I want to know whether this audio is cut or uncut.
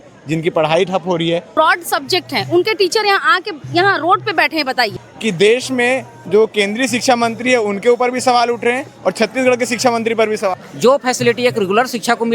cut